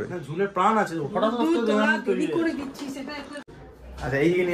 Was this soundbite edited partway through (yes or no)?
yes